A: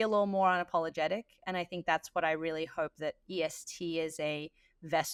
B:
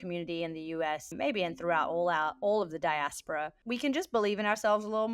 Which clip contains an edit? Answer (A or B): B